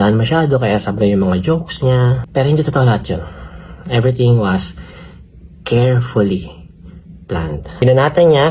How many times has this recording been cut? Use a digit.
2